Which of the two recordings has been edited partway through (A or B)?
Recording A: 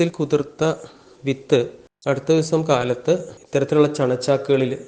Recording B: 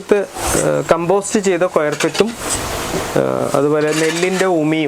A